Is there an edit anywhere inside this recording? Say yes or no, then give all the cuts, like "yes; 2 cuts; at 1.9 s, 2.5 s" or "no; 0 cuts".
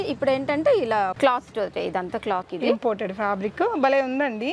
yes; 2 cuts; at 1.1 s, 2.5 s